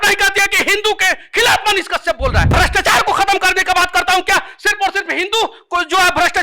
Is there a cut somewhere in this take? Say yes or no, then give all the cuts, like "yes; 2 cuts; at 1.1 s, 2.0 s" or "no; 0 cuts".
yes; 1 cut; at 2.5 s